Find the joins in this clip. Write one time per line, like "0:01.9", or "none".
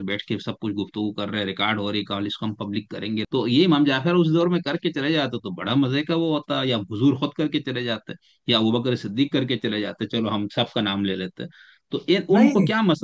0:03.2